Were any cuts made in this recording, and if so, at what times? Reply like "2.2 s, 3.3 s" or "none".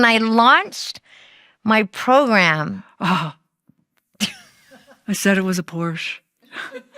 2.9 s